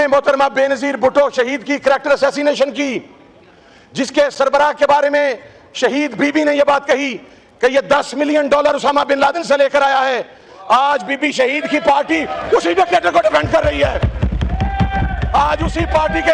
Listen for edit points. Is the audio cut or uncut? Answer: uncut